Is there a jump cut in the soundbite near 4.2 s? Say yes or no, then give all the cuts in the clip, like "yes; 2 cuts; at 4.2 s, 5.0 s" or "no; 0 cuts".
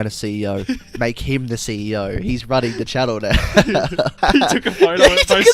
yes; 1 cut; at 4.2 s